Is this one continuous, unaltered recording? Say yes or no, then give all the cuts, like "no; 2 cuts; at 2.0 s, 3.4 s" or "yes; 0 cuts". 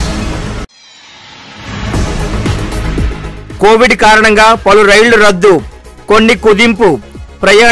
no; 1 cut; at 2.9 s